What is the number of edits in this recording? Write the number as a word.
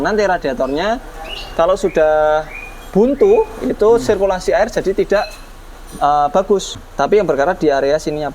one